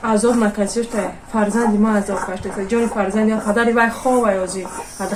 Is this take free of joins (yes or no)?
yes